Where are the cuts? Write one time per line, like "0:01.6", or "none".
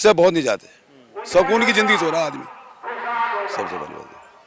none